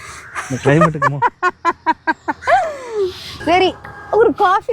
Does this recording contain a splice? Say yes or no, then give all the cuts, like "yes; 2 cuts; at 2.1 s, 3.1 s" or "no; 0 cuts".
yes; 1 cut; at 3.3 s